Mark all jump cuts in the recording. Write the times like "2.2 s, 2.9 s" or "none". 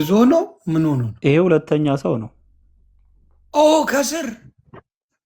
1.1 s